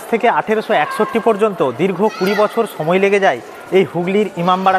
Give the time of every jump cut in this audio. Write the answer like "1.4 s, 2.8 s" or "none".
none